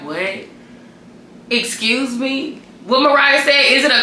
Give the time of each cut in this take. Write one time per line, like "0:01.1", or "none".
none

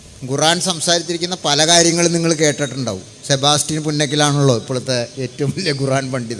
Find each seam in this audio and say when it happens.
none

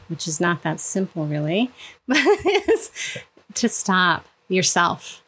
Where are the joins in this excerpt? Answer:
0:04.3

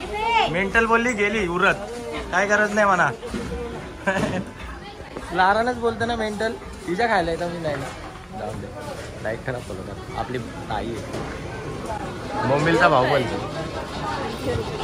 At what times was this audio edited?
none

